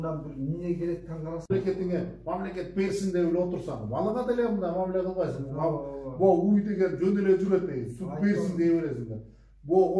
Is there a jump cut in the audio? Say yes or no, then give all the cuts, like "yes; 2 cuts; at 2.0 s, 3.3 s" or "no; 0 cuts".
yes; 1 cut; at 1.5 s